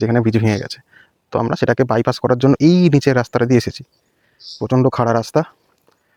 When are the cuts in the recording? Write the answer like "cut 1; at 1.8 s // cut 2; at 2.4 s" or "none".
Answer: none